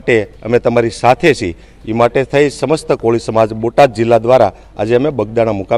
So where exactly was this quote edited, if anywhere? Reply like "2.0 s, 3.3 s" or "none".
none